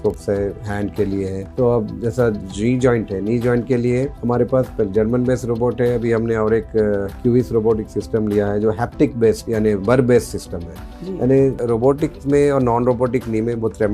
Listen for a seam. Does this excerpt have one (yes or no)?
no